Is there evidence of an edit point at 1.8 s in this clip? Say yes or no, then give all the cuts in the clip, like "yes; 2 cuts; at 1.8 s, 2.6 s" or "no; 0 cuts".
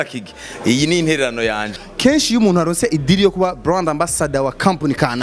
yes; 1 cut; at 1.8 s